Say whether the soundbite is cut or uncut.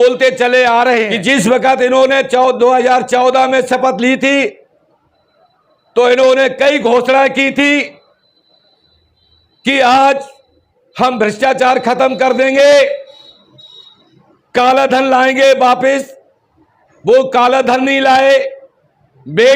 cut